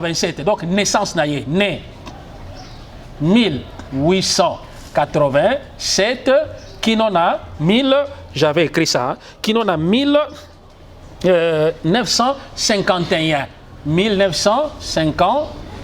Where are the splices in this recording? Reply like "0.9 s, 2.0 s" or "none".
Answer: none